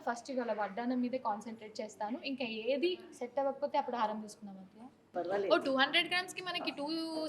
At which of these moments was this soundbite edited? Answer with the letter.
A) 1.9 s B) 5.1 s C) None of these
B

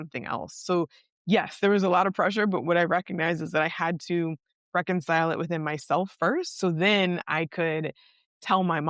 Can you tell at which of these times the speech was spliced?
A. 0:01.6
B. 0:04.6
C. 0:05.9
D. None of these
D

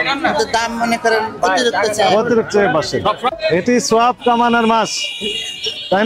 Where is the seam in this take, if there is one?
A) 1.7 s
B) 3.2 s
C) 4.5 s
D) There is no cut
B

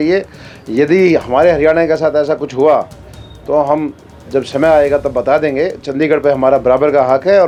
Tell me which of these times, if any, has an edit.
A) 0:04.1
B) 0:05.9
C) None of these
C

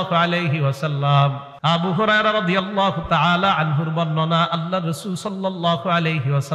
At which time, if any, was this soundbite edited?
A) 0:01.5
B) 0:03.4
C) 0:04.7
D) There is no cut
A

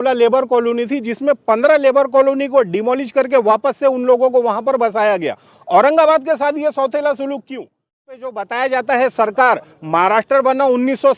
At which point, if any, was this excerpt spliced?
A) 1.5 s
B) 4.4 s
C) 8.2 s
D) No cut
C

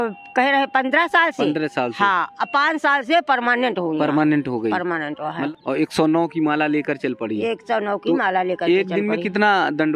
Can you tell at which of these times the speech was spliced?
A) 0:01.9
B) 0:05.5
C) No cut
B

